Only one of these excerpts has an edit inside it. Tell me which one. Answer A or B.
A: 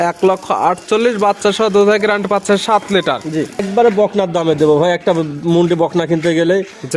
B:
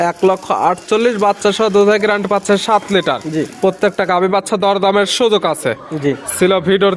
A